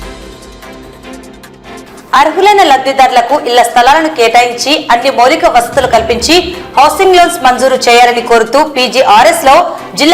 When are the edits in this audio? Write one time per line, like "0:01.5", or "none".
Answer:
0:01.8